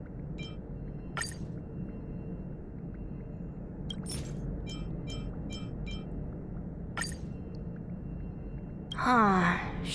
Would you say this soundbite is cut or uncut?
uncut